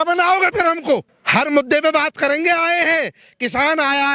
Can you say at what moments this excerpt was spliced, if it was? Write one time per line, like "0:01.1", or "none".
0:01.2

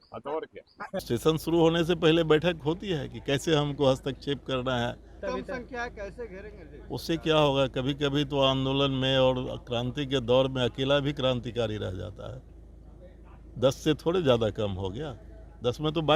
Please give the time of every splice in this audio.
0:01.1
0:05.2

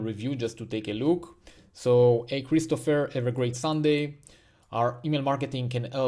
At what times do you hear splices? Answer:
none

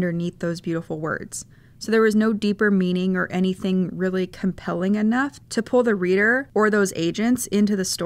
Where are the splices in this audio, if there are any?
0:05.4

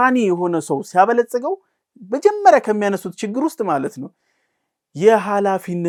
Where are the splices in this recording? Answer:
none

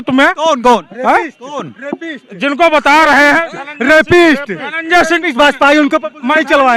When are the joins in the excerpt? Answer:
none

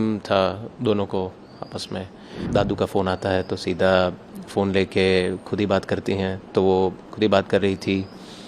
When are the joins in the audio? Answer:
0:02.5

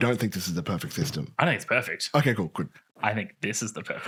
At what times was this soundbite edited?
none

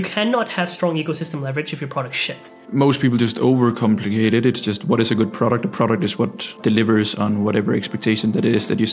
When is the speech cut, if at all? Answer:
0:02.6
0:06.5

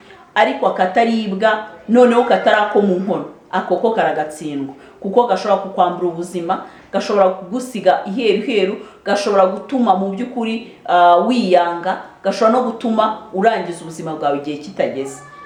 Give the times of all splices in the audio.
none

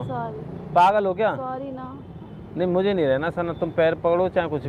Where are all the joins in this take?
none

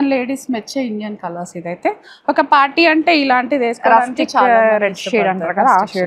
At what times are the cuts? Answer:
none

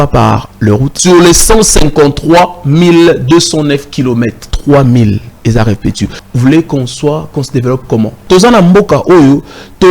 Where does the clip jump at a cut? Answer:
0:00.9
0:04.5
0:06.2
0:08.2

